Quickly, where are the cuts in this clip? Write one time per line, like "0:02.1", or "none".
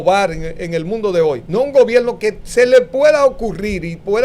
0:01.4